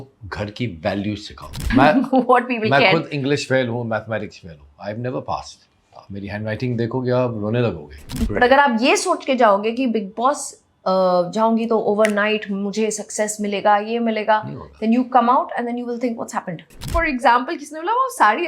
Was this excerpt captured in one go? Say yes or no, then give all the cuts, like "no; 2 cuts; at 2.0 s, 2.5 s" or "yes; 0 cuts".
no; 3 cuts; at 1.6 s, 8.2 s, 16.9 s